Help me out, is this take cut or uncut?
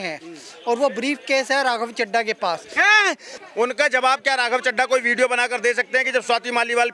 cut